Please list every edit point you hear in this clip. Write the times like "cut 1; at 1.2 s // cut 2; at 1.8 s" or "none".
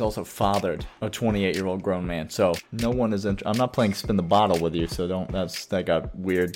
cut 1; at 2.6 s